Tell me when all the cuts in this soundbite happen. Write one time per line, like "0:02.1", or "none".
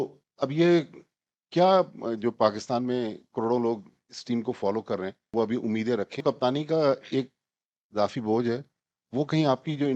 0:05.2
0:06.2